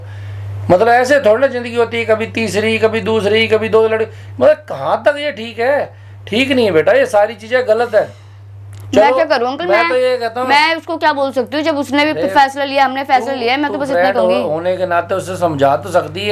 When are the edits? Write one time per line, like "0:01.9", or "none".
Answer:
none